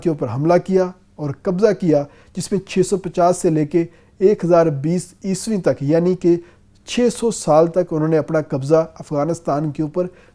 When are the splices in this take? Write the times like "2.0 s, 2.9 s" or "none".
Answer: none